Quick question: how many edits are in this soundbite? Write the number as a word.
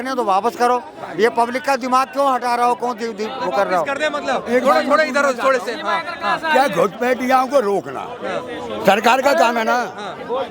zero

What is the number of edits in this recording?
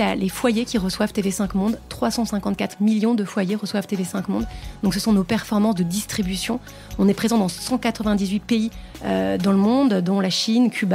zero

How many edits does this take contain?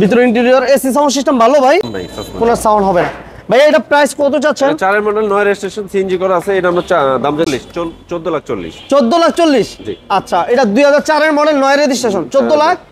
two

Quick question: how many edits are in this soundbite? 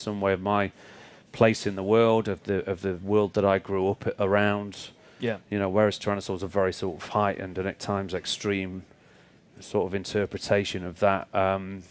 zero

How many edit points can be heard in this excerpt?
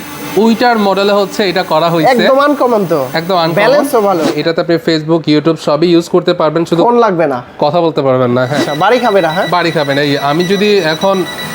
two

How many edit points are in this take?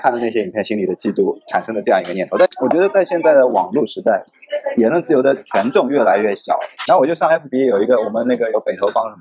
two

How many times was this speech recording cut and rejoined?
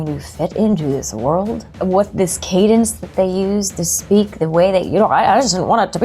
one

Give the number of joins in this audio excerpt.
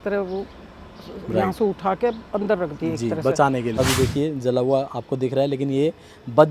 one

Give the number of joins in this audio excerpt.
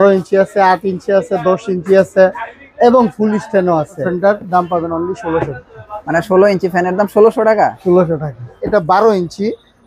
two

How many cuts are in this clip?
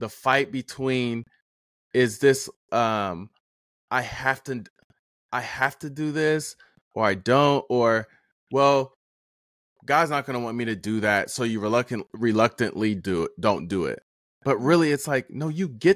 zero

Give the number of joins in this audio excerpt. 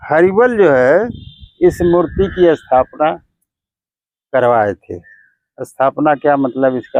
zero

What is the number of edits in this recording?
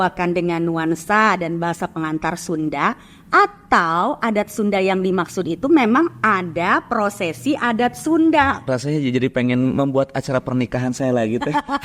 one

